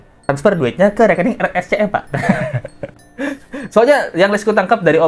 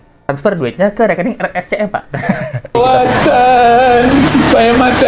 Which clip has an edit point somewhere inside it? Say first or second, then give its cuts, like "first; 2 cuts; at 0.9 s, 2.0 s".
second; 1 cut; at 2.7 s